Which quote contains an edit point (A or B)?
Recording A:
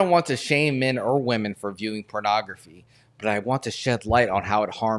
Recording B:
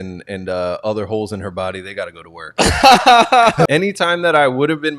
B